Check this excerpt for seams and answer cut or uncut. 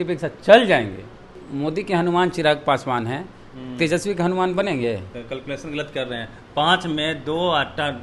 cut